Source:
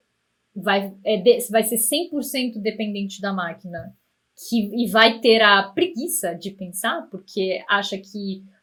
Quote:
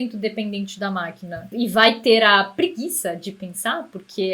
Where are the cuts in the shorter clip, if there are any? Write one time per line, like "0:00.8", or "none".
0:01.5